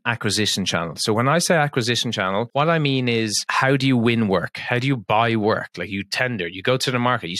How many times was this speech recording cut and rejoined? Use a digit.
0